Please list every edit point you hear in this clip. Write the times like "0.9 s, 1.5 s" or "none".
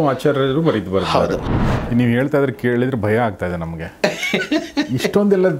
1.6 s

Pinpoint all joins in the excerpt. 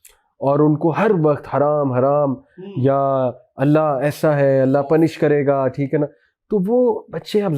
none

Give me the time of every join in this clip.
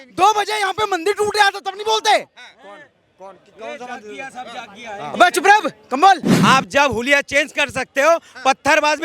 6.3 s

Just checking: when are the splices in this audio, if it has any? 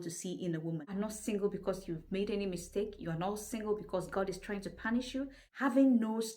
0.8 s, 5.4 s

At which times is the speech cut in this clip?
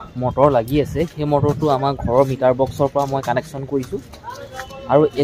none

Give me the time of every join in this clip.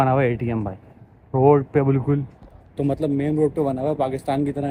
none

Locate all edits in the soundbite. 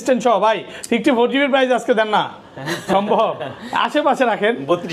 none

